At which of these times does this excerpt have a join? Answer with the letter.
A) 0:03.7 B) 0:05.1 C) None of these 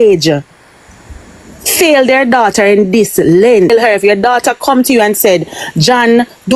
A